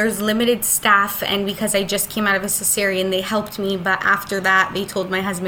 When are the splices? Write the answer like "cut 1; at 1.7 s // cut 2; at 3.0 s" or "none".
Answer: none